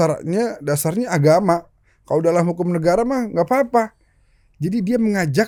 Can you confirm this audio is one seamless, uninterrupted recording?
yes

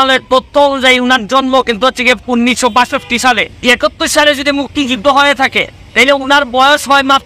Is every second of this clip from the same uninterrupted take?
no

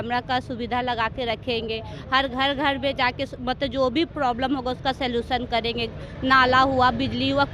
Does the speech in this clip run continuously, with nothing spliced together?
yes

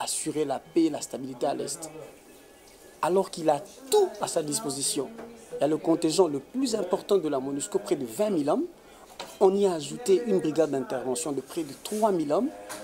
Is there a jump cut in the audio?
no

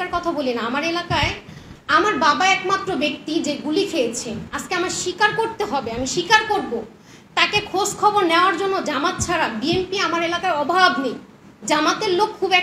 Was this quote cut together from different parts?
no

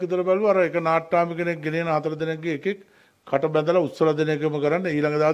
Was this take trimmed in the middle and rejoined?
no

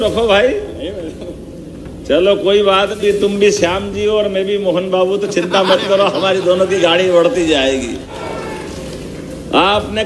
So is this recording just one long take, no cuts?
no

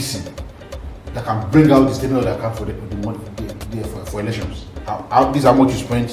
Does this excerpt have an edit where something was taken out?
no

